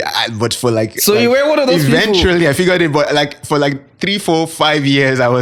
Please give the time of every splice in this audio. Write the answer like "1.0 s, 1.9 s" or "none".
none

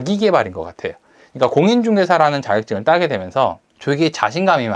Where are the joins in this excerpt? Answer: 3.7 s

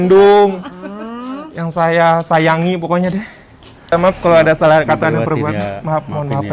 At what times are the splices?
3.9 s

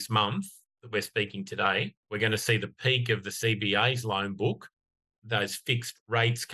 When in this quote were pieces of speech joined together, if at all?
2.0 s

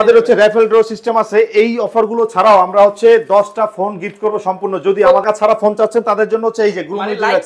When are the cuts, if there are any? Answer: 5.2 s

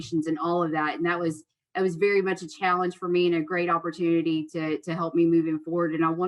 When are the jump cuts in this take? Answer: none

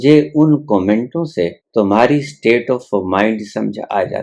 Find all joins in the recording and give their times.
1.6 s

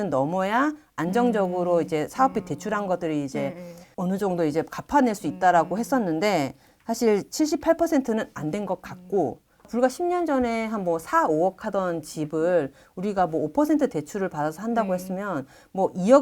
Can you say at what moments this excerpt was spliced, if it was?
9.5 s

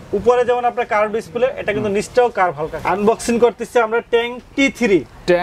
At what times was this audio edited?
2.7 s

